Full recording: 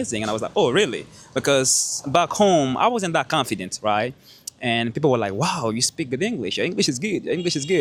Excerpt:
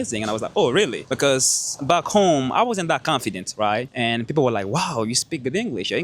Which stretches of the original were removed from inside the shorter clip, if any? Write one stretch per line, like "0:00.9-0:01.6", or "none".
0:01.0-0:01.3
0:04.1-0:04.6